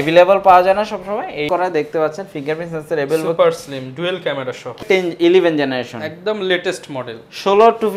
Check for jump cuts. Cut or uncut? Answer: cut